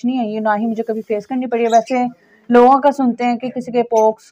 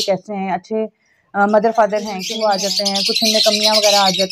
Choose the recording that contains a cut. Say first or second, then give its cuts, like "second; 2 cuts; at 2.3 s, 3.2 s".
second; 1 cut; at 2.2 s